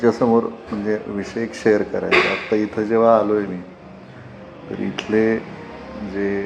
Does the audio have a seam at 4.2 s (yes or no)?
no